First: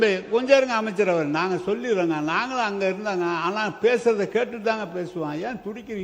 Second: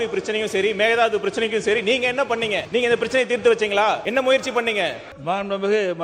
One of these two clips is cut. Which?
second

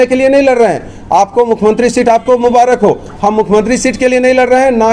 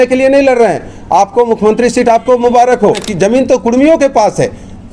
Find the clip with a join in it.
second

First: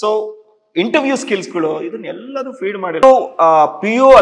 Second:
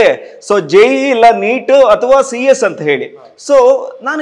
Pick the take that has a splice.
first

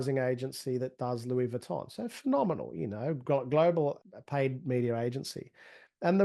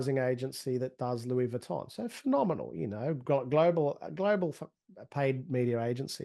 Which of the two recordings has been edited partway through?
first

